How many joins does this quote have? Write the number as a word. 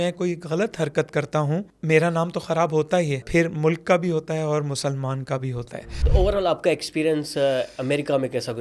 three